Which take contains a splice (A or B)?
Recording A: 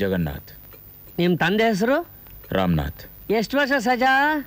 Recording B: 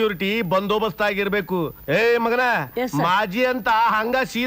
B